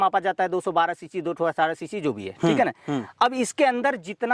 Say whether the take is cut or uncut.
uncut